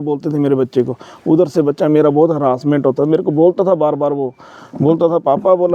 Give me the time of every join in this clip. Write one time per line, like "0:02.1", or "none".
none